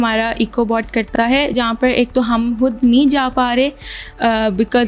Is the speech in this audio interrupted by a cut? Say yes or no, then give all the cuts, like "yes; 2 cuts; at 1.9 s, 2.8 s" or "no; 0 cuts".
yes; 1 cut; at 1.5 s